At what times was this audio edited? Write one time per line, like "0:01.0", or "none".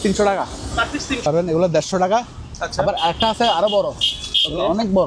0:01.2